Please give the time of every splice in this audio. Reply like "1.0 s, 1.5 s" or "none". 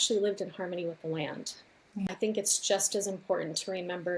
2.1 s